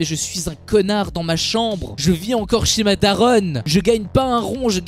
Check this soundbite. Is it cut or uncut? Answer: uncut